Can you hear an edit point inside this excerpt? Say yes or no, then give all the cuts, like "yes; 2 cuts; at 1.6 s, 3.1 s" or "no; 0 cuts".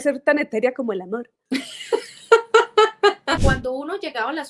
yes; 2 cuts; at 1.3 s, 3.4 s